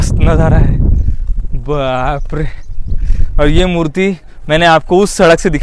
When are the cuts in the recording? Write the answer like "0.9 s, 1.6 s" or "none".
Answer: none